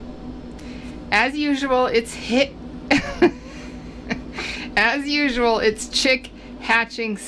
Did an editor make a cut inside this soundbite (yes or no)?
no